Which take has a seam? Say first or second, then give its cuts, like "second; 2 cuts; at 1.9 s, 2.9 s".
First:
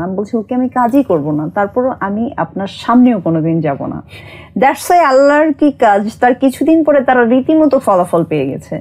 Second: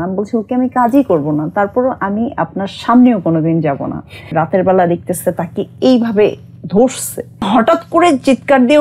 second; 2 cuts; at 4.3 s, 7.5 s